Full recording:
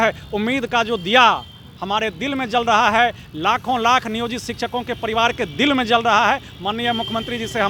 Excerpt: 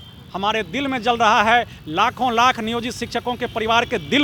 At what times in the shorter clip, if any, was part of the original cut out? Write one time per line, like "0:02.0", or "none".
none